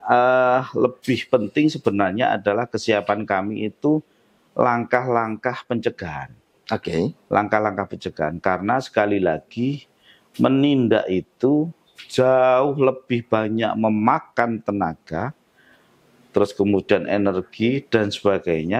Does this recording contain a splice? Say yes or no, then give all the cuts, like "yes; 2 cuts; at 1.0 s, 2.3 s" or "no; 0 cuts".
no; 0 cuts